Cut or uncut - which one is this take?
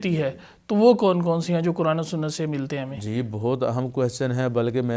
uncut